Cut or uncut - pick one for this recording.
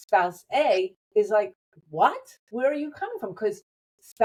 uncut